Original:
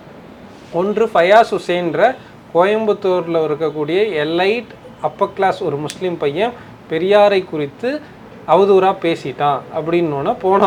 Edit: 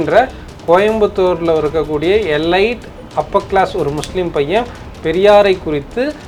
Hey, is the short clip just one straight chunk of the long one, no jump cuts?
yes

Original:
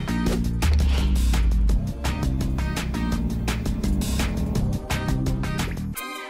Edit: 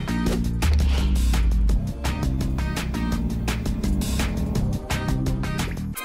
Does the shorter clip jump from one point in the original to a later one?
no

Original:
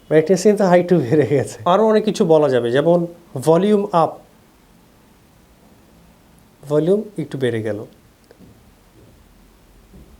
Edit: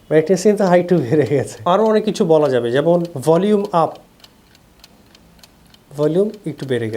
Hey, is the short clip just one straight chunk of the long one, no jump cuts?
no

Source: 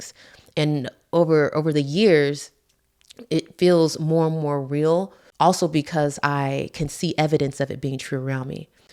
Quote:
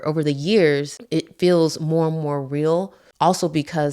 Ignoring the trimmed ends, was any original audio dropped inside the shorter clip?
yes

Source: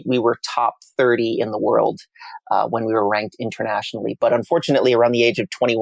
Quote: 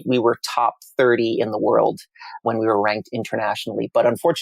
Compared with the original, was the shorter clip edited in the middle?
yes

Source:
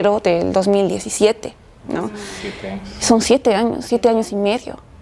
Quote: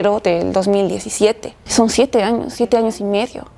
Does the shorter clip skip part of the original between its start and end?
yes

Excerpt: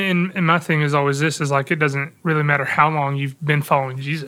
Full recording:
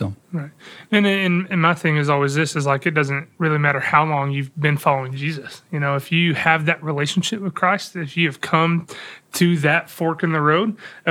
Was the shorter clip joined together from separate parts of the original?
no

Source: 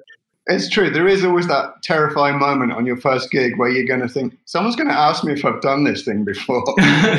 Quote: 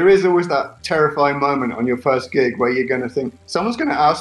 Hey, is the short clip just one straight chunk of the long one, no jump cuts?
yes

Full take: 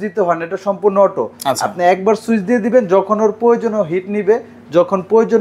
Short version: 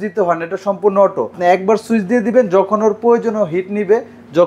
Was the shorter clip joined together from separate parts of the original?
yes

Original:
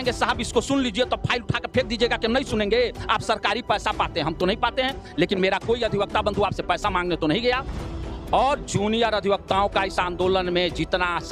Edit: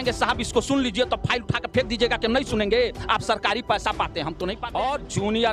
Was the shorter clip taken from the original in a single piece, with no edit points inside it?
no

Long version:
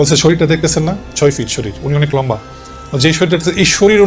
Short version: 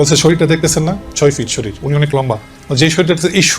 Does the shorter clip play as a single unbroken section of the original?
no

